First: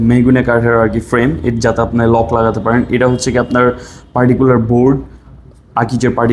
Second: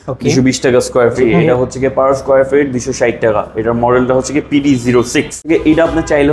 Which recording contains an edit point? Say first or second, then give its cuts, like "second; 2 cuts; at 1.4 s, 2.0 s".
second; 2 cuts; at 1.3 s, 5.4 s